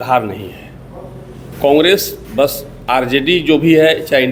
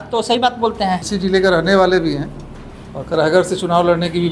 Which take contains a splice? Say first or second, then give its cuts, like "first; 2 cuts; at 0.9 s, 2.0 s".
second; 1 cut; at 1.0 s